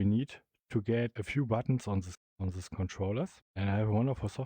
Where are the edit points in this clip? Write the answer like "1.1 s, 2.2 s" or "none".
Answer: 1.1 s, 2.2 s, 3.4 s